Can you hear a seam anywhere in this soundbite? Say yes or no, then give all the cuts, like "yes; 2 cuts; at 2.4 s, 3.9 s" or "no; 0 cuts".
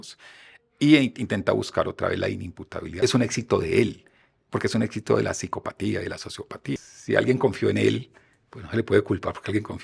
yes; 2 cuts; at 3.0 s, 6.8 s